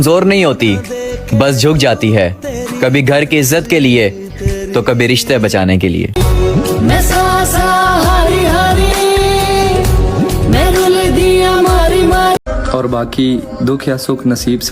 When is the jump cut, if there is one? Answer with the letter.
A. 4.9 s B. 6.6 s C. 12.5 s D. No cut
C